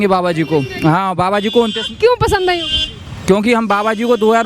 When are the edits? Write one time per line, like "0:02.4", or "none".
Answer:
none